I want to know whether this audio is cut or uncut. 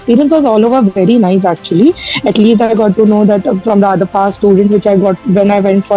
uncut